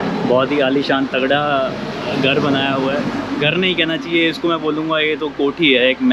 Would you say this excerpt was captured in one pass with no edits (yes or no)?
yes